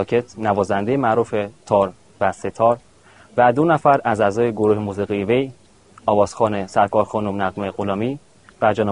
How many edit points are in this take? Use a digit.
1